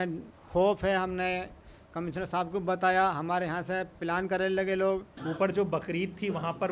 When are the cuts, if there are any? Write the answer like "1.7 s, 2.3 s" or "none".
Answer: 5.1 s